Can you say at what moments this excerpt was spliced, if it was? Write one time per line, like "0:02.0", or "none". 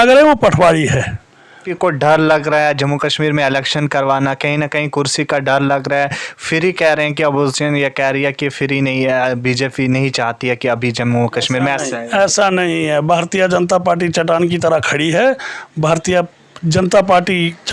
0:01.7